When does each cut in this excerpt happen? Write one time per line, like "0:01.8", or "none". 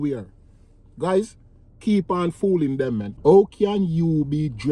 0:03.1